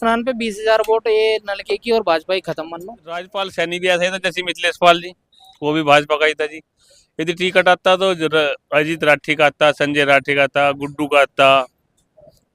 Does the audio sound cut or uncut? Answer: cut